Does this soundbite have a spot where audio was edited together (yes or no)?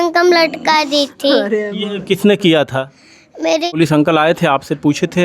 yes